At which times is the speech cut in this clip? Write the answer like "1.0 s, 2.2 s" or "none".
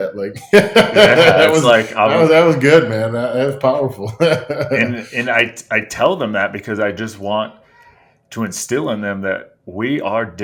none